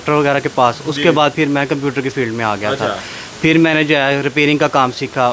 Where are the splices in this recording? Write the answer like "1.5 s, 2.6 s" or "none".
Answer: none